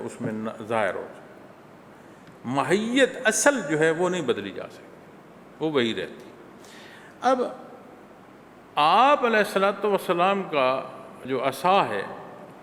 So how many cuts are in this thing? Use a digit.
0